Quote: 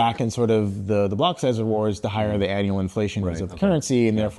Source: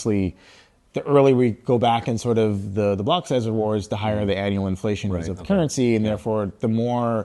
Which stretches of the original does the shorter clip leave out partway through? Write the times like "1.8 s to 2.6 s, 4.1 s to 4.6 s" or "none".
none

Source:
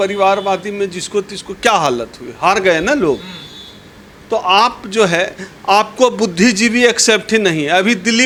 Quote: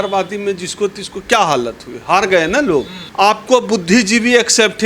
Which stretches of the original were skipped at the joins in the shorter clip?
3.3 s to 5.5 s

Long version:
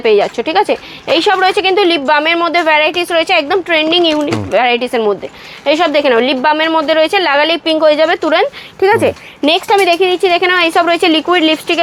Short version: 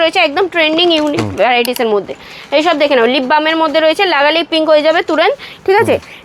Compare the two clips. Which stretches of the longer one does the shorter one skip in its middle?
none

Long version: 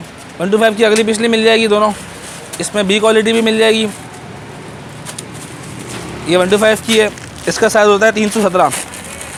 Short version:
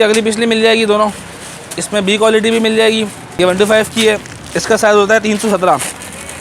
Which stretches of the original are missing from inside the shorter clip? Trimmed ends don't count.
4.0 s to 6.1 s

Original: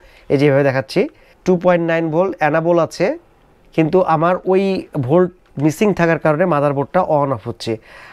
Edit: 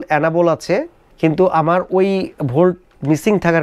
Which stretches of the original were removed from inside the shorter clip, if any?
3.3 s to 3.5 s

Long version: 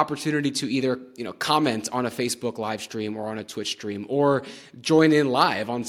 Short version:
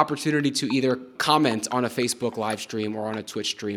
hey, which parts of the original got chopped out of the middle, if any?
1.1 s to 1.3 s

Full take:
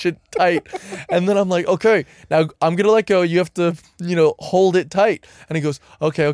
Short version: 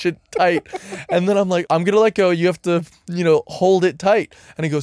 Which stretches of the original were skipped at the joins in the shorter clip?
1.6 s to 2.5 s

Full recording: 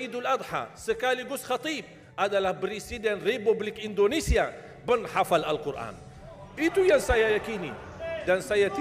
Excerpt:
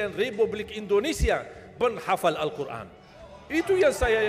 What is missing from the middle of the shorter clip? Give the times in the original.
none

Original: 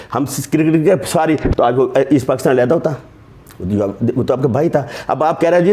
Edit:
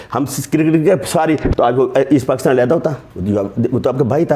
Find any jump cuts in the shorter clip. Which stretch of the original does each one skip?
3.1 s to 3.5 s

